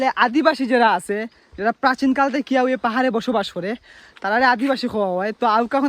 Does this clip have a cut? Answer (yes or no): no